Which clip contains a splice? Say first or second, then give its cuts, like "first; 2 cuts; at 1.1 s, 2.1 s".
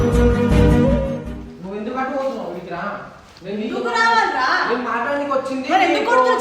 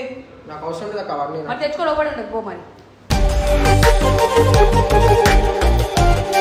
first; 1 cut; at 1.3 s